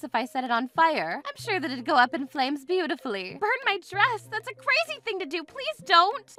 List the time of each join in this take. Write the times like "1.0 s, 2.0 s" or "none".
none